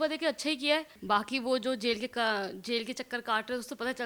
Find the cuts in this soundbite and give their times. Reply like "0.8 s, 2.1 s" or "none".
0.9 s